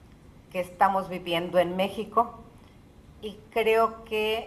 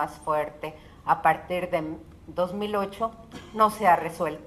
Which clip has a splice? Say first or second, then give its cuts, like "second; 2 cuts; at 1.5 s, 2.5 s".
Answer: second; 1 cut; at 2.0 s